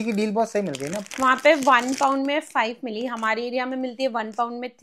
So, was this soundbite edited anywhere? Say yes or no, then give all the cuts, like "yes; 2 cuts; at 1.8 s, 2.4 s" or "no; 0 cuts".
no; 0 cuts